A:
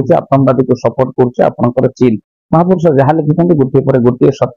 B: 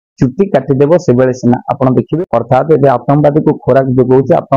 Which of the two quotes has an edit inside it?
B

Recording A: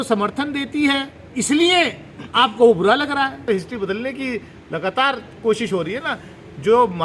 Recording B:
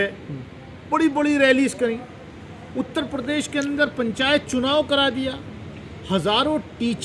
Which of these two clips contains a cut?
A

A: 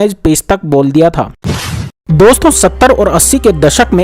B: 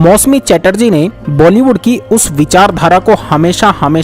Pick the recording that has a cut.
A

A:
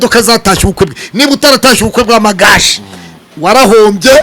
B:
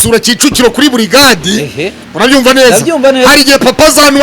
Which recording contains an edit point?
B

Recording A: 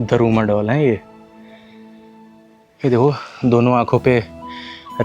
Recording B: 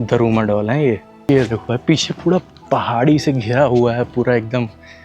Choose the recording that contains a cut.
B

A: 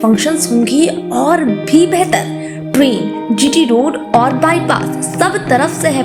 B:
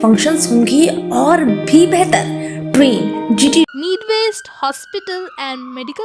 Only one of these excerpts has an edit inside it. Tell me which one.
B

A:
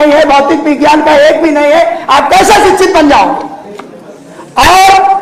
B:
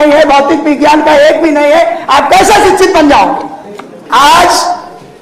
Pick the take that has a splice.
B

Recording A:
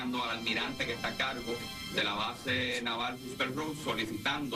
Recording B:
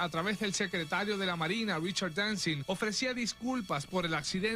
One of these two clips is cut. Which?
B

